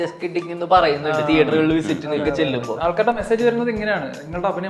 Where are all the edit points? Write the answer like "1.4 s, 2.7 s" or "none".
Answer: 2.7 s